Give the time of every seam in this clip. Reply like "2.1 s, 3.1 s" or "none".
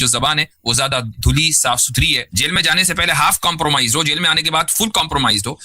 2.3 s